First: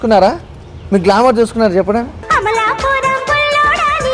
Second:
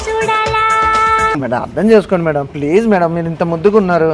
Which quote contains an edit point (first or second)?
second